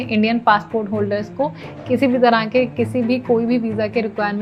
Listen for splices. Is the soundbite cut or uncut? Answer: uncut